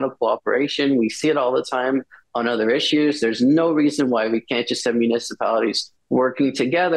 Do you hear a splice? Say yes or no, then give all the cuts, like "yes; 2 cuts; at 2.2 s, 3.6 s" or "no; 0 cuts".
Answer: no; 0 cuts